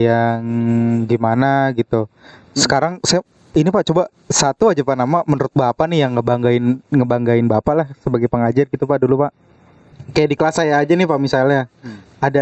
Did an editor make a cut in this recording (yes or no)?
yes